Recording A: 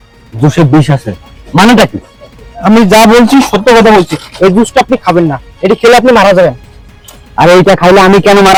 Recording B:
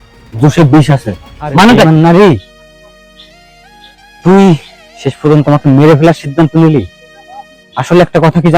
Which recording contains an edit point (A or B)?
B